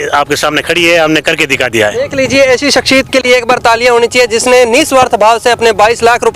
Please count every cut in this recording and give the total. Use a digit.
1